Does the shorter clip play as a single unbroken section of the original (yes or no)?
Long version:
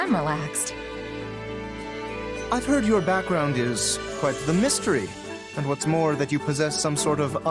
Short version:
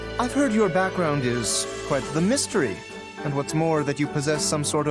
yes